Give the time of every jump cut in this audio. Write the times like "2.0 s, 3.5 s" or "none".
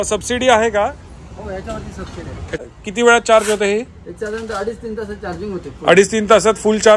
2.6 s